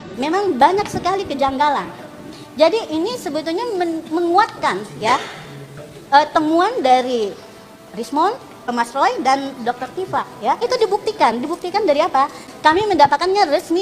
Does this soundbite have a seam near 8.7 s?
yes; 3 cuts; at 8.7 s, 10.6 s, 12.4 s

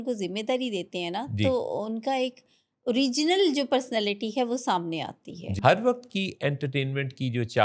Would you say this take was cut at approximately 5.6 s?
yes; 1 cut; at 5.6 s

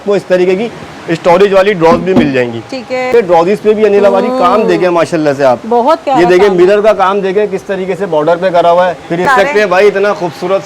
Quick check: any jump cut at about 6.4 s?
no; 2 cuts; at 3.1 s, 9.3 s

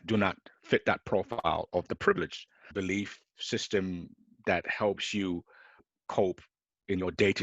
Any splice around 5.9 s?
yes; 2 cuts; at 2.7 s, 5.9 s

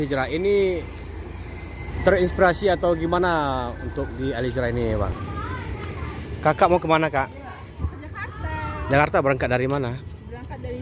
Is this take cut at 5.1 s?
yes; 1 cut; at 5.1 s

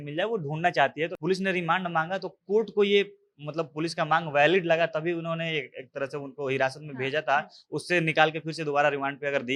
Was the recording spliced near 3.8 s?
no; 1 cut; at 1.2 s

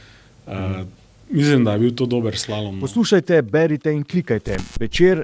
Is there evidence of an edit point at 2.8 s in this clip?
yes; 1 cut; at 2.8 s

